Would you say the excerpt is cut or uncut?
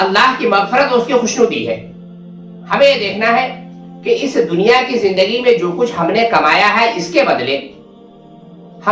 uncut